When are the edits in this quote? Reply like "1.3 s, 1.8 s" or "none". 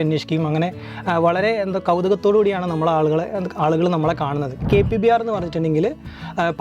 4.7 s